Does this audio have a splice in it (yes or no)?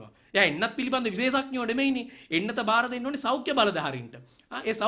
no